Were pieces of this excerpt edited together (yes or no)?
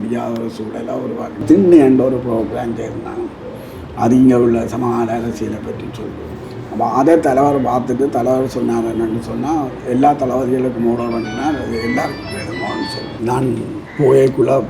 yes